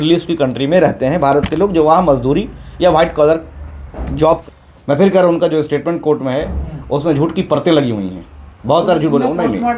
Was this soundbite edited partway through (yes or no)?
yes